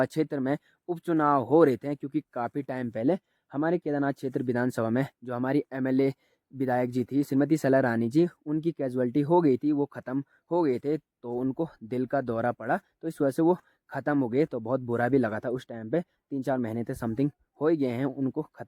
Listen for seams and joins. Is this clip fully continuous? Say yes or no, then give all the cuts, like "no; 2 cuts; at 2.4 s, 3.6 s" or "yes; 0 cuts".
yes; 0 cuts